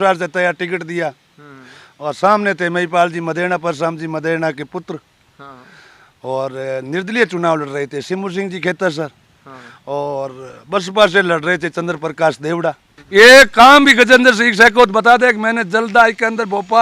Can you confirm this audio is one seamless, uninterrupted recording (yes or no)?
no